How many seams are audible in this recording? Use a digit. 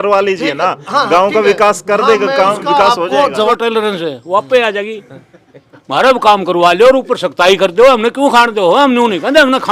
1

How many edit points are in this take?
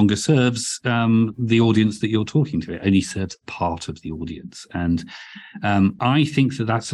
0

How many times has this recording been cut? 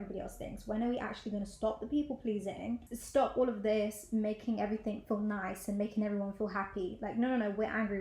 1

